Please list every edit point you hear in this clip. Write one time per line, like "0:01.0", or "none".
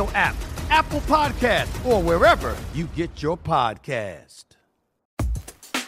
0:04.9